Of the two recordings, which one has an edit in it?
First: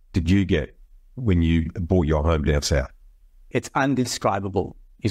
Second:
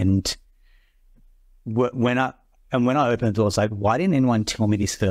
first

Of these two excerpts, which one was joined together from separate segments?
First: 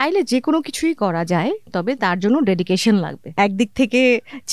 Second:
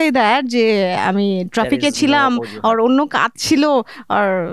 first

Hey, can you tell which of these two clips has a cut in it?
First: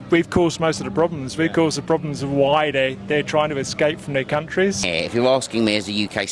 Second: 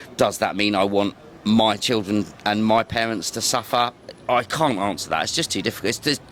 first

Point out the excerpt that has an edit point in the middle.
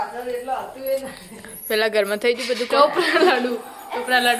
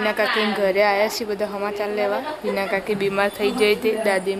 first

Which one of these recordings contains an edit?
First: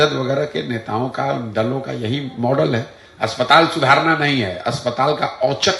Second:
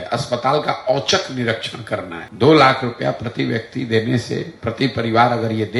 second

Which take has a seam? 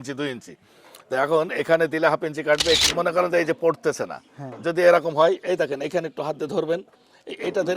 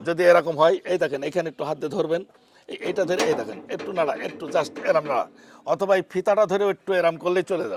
first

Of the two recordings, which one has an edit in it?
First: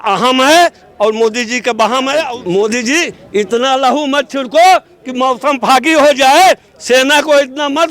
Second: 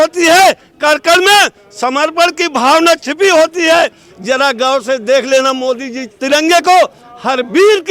first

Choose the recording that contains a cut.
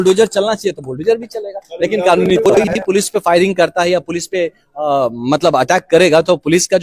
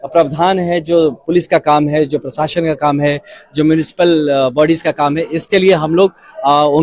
first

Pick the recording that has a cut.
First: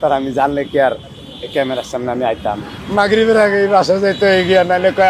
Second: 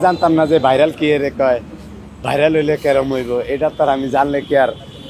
first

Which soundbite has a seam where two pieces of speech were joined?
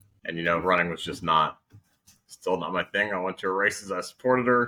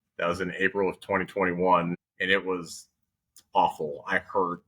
second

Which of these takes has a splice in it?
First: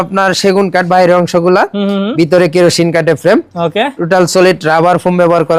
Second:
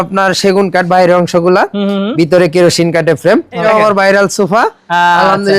second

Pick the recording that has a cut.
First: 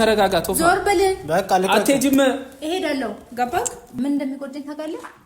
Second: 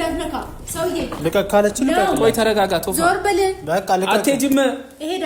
first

